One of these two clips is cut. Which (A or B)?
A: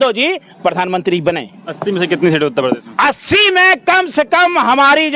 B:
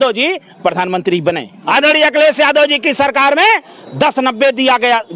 B